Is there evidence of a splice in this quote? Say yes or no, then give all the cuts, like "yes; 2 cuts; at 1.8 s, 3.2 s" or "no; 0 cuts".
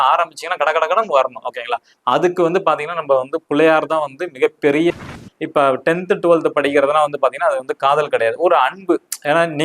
yes; 1 cut; at 4.9 s